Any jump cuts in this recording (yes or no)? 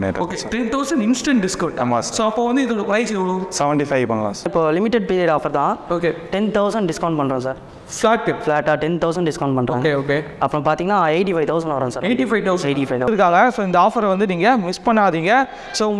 yes